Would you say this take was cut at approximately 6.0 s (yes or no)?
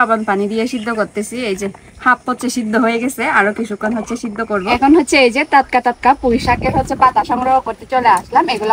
no